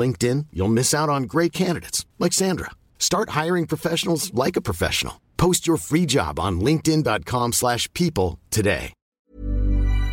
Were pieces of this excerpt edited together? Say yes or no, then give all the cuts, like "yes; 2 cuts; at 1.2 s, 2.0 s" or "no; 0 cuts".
yes; 1 cut; at 9.0 s